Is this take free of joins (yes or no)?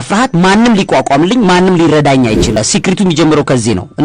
no